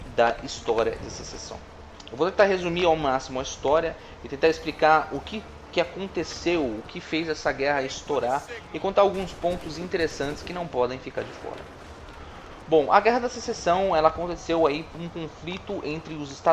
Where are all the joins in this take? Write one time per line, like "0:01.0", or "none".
0:11.8